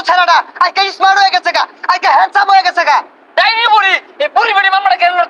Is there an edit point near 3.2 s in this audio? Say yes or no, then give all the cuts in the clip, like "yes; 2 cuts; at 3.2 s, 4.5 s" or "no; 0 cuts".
yes; 1 cut; at 3.2 s